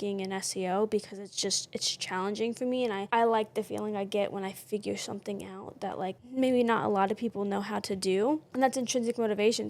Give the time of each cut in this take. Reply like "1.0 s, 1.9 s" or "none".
3.0 s, 6.2 s, 8.5 s